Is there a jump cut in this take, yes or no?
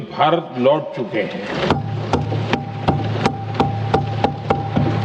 no